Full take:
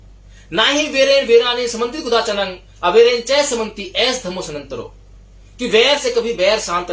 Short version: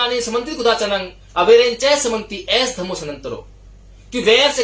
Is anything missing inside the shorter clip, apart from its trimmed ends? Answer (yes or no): no